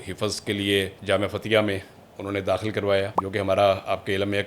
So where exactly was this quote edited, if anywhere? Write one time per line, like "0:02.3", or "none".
0:01.0
0:03.2